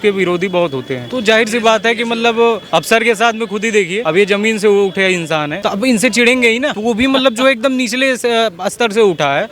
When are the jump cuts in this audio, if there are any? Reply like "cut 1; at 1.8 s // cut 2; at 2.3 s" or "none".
cut 1; at 1.0 s // cut 2; at 2.6 s // cut 3; at 4.0 s // cut 4; at 5.5 s // cut 5; at 6.7 s